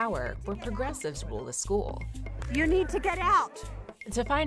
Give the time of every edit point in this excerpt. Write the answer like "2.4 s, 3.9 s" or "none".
none